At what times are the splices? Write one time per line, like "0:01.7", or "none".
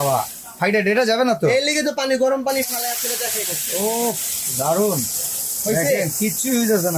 none